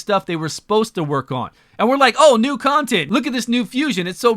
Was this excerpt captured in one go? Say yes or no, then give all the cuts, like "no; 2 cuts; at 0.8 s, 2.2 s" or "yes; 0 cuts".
no; 1 cut; at 3.0 s